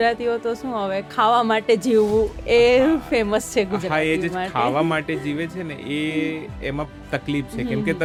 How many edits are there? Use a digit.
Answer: 0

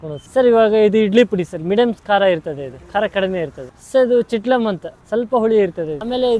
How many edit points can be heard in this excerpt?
0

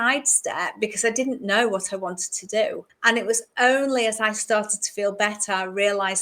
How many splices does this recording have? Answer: 1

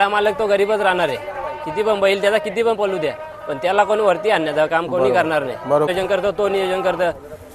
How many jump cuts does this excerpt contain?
1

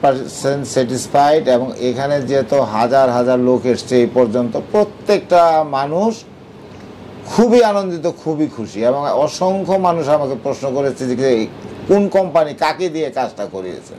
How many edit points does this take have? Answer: 0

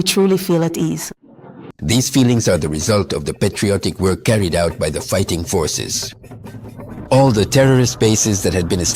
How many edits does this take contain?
1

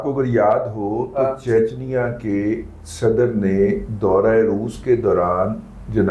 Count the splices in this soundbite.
0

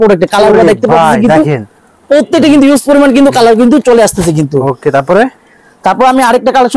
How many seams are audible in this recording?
0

